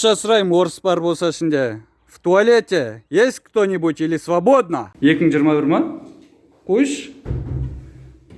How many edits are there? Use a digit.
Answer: 1